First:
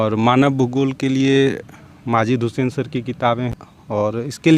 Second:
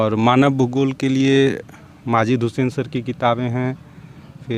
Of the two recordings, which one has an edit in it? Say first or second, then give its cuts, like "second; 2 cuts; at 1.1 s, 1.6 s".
first; 1 cut; at 3.5 s